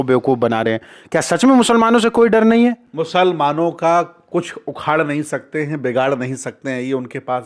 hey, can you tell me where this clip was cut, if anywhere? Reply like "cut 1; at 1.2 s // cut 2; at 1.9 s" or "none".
none